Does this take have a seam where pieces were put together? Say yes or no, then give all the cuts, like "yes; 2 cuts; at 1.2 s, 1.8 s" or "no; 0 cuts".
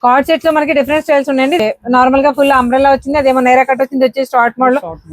yes; 1 cut; at 1.6 s